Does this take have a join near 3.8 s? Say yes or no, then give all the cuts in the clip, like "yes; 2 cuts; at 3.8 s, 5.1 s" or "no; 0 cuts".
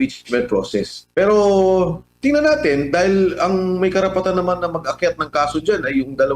no; 1 cut; at 1.0 s